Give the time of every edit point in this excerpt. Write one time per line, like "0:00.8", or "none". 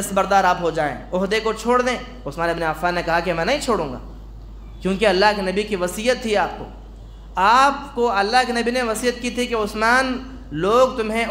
none